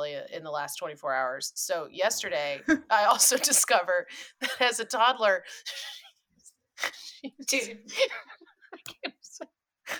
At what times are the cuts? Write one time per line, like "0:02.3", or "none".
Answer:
none